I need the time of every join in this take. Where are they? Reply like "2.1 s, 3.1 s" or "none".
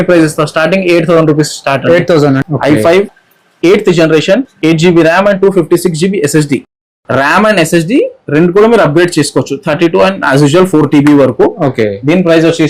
2.4 s